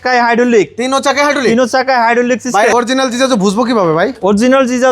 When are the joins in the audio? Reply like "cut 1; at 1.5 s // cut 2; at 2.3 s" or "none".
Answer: cut 1; at 2.7 s